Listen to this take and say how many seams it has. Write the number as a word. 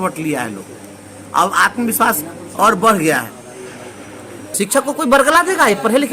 one